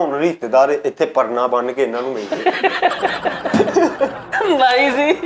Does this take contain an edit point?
yes; 1 cut; at 4.2 s

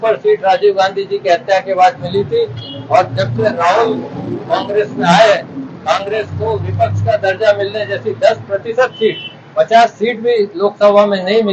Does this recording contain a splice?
no; 0 cuts

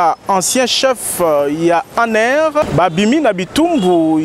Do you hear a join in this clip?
yes; 1 cut; at 2.6 s

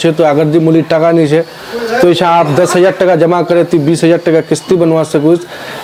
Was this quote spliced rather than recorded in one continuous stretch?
no; 0 cuts

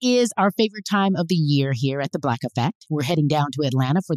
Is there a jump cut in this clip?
no; 0 cuts

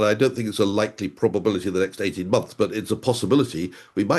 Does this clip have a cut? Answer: no; 0 cuts

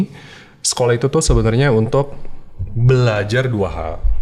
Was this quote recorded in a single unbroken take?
yes; 0 cuts

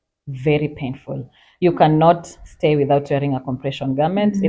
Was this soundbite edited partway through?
no; 0 cuts

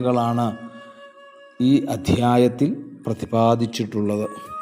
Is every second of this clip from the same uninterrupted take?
yes; 0 cuts

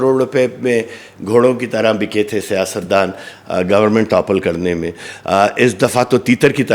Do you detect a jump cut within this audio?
no; 0 cuts

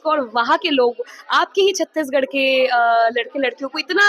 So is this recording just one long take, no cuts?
yes; 0 cuts

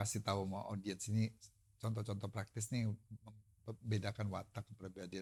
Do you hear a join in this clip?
no; 0 cuts

